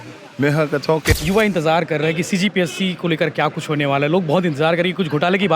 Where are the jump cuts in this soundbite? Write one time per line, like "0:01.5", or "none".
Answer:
0:01.1